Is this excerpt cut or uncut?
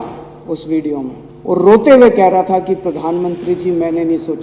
cut